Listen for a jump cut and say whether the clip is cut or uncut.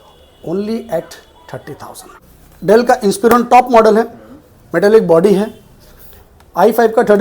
cut